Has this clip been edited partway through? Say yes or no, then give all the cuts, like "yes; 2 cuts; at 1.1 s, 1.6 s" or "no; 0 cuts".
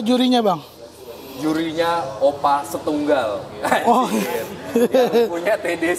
no; 0 cuts